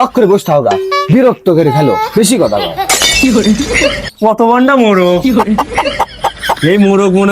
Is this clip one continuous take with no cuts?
no; 1 cut; at 4.1 s

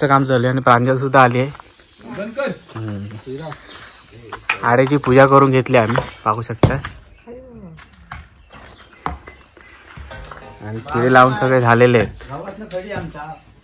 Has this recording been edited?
no; 0 cuts

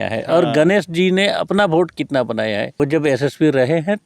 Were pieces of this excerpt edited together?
yes; 1 cut; at 2.8 s

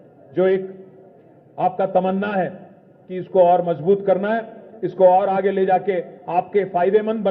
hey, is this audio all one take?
yes; 0 cuts

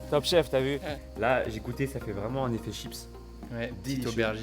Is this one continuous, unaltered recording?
no; 1 cut; at 1.0 s

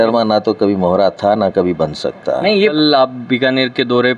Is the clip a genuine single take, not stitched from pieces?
no; 1 cut; at 2.7 s

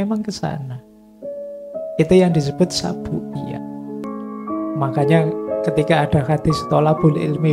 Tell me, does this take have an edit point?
yes; 1 cut; at 4.0 s

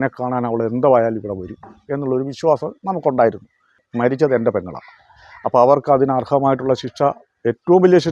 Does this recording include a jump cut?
yes; 1 cut; at 3.8 s

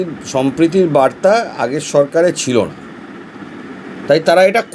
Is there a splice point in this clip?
no; 0 cuts

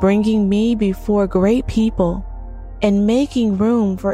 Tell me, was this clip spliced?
no; 0 cuts

